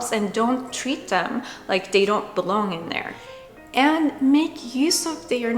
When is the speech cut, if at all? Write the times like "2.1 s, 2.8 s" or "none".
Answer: 3.5 s